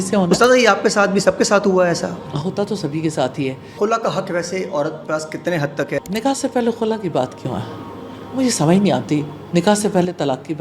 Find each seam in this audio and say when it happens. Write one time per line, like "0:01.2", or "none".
0:02.2
0:03.8
0:06.0